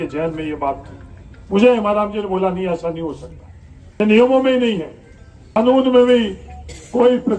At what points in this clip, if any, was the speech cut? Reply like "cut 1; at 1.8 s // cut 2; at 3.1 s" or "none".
cut 1; at 4.0 s // cut 2; at 5.6 s